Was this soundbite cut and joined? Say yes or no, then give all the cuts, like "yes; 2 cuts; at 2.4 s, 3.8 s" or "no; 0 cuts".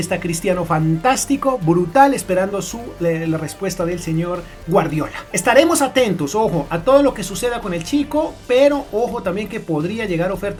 no; 0 cuts